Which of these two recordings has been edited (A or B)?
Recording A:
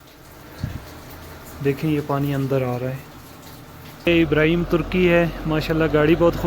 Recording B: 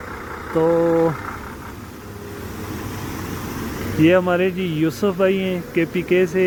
A